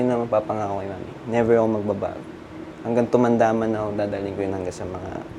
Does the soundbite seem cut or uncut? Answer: uncut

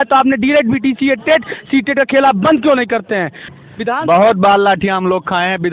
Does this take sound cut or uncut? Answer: cut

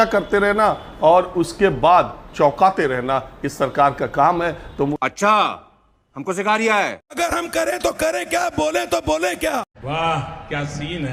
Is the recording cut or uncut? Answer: uncut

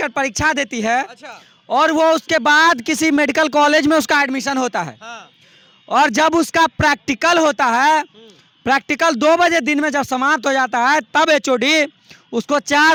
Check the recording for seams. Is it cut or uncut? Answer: uncut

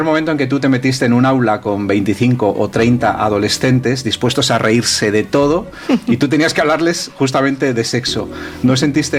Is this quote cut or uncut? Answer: uncut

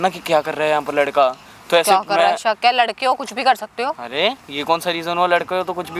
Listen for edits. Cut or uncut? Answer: uncut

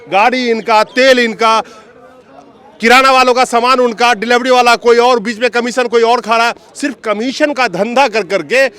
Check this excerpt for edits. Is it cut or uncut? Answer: uncut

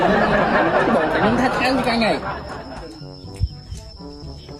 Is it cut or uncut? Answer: uncut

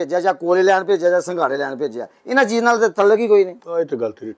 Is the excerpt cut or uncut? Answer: uncut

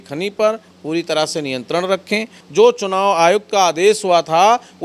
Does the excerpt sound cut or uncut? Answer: cut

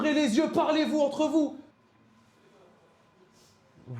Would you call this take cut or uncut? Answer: cut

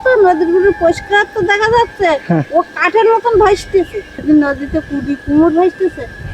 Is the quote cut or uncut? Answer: cut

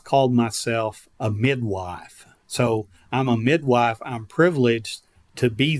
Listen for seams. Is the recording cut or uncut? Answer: cut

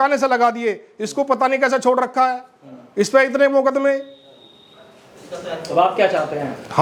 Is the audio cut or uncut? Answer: uncut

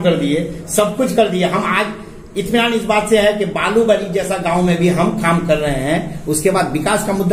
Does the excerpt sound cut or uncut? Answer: uncut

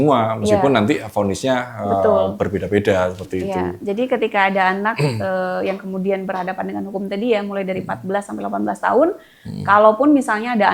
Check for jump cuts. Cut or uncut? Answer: uncut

